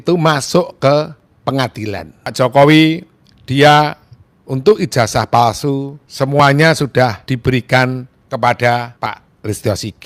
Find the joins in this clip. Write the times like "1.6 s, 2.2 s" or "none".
2.2 s, 6.0 s, 7.3 s, 8.1 s, 8.9 s